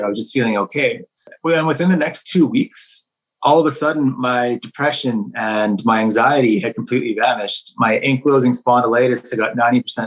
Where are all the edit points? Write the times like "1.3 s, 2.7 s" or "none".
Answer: 1.3 s

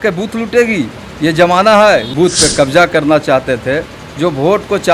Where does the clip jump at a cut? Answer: 2.1 s

